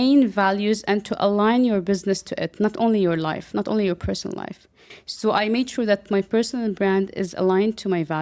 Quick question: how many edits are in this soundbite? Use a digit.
0